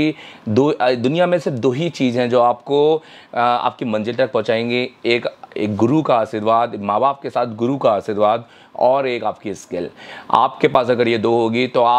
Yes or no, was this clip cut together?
no